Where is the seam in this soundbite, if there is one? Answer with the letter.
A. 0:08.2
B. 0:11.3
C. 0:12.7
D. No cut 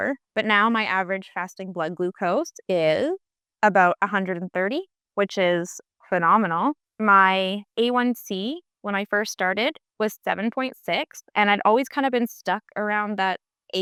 D